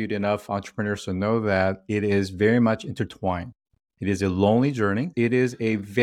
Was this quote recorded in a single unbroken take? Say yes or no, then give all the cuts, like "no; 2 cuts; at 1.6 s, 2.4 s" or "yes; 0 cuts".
no; 1 cut; at 5.1 s